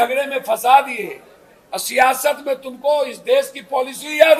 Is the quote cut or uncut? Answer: uncut